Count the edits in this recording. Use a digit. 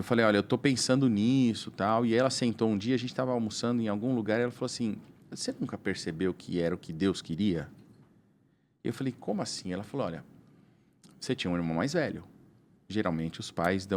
0